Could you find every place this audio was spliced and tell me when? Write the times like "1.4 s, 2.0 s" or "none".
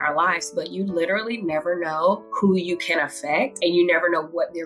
2.3 s, 3.5 s